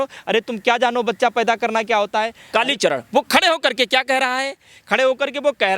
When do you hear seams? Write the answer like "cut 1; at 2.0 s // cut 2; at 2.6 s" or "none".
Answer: cut 1; at 2.4 s